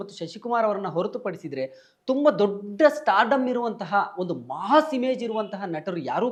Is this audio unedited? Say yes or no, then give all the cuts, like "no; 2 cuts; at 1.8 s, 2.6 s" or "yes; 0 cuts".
yes; 0 cuts